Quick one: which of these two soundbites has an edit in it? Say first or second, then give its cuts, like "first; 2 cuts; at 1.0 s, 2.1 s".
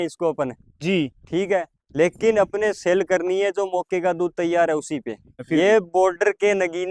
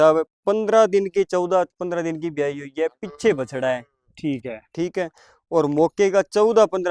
first; 1 cut; at 5.4 s